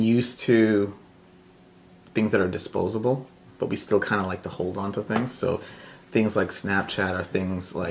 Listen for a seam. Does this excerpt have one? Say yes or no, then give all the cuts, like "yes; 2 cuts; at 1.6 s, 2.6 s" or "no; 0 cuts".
no; 0 cuts